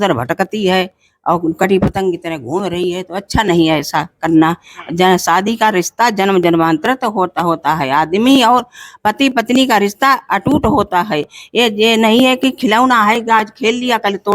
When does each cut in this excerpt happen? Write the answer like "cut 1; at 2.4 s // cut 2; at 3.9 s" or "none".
none

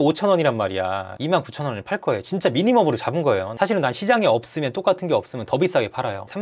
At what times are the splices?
none

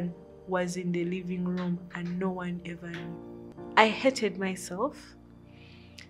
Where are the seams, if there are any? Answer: cut 1; at 3.5 s

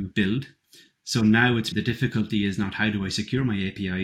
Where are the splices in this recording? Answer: cut 1; at 1.7 s

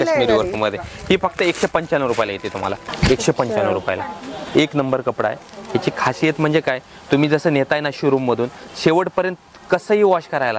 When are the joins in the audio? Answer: cut 1; at 2.8 s

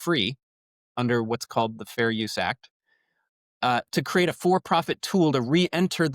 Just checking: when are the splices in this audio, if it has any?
none

